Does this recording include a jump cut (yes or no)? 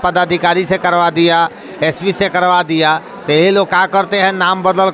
no